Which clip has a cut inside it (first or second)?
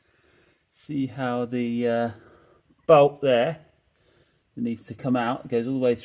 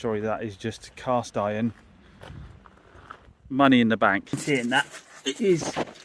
second